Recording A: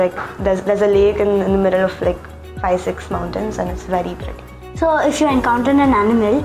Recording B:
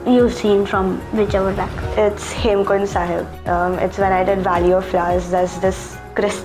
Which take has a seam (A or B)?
A